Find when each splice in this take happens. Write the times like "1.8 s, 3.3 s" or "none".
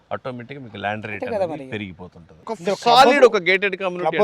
2.4 s